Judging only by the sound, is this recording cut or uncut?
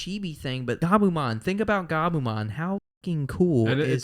cut